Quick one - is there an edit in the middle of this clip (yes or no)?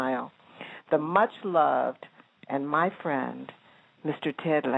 no